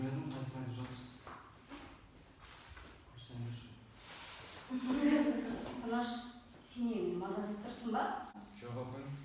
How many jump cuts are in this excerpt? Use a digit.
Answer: 1